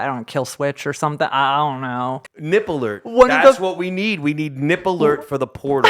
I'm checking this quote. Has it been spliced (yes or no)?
yes